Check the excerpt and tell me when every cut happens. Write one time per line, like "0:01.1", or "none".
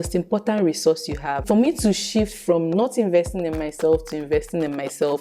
0:01.4